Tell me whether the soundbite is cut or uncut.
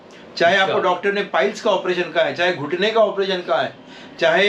uncut